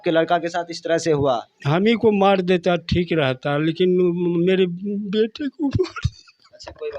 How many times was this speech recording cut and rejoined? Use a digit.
1